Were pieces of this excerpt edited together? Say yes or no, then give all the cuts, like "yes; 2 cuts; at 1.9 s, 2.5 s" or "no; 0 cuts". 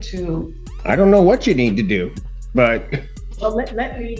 yes; 1 cut; at 3.2 s